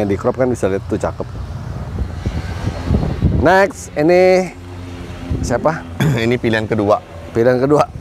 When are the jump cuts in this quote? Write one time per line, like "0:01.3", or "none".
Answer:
0:02.1